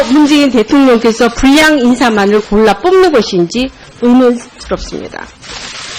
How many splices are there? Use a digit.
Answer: 0